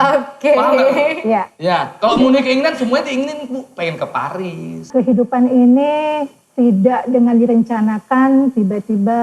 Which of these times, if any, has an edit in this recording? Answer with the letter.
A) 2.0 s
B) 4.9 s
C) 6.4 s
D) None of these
B